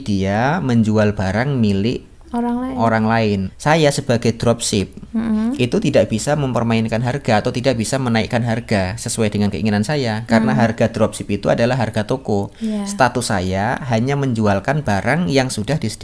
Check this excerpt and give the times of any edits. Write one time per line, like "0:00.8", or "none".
0:03.5